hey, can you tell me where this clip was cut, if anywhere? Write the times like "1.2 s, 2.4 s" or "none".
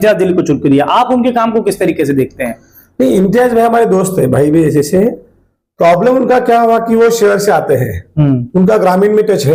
none